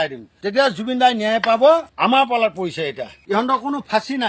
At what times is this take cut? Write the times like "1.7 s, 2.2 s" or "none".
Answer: 1.9 s, 3.1 s